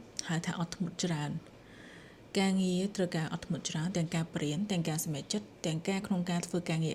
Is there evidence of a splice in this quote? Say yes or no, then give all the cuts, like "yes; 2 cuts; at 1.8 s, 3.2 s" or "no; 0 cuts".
no; 0 cuts